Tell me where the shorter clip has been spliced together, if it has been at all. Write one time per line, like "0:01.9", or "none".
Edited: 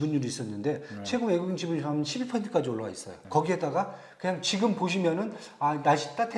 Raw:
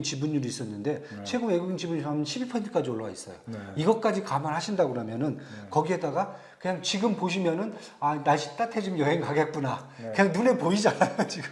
0:03.1